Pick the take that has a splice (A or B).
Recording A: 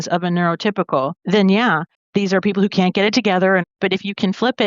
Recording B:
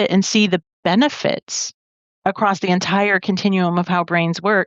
A